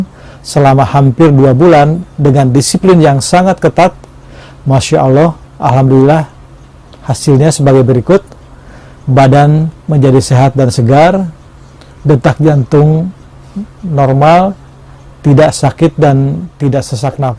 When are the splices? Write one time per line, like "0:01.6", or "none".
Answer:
none

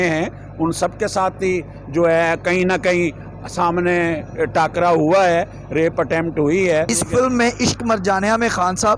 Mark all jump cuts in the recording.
0:06.9

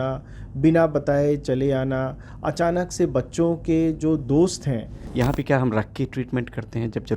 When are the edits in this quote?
0:05.1

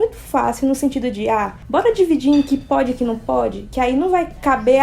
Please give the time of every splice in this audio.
0:01.6
0:03.6

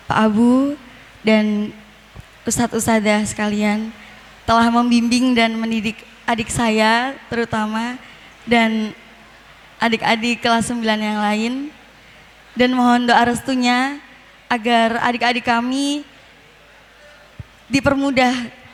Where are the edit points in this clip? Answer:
none

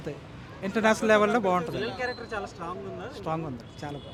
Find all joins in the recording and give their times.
none

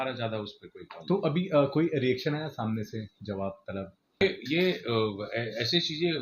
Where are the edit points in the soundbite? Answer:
0:04.2

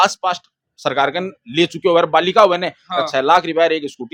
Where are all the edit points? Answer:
none

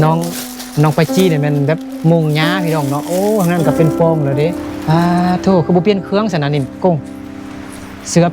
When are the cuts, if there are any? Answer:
0:04.8

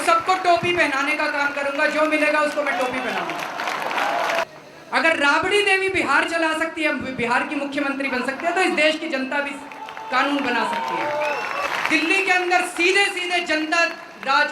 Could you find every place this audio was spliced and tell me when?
0:04.6
0:11.7

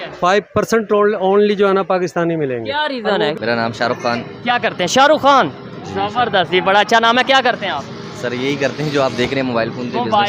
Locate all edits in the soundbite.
0:03.4

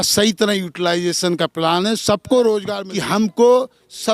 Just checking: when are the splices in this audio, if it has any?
0:02.8

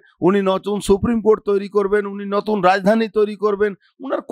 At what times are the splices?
none

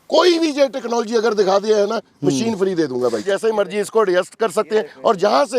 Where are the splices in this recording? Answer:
0:03.2

